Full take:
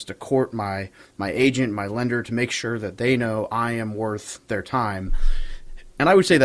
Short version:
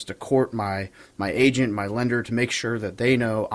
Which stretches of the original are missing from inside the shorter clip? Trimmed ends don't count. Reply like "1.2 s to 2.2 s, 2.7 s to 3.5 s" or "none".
none